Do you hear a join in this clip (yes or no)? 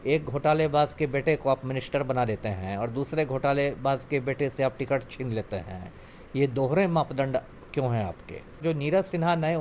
yes